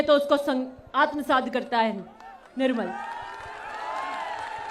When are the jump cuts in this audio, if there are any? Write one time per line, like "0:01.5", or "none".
none